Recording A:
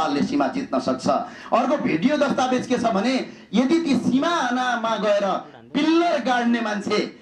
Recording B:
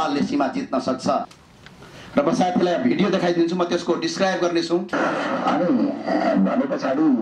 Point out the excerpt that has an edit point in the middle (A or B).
B